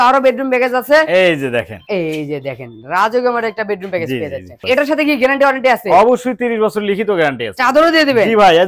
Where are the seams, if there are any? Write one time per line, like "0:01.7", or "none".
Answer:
0:04.6
0:07.6